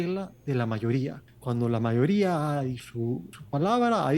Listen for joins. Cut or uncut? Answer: cut